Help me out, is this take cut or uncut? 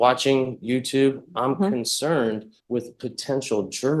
cut